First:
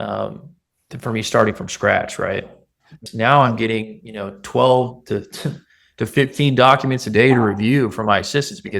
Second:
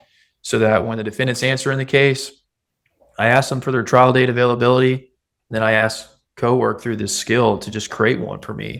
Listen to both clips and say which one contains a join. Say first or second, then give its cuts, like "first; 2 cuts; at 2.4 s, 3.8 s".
first; 1 cut; at 3.0 s